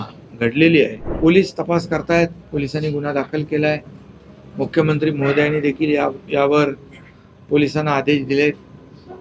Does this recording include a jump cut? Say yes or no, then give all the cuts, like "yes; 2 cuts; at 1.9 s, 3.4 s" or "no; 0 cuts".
yes; 1 cut; at 1.0 s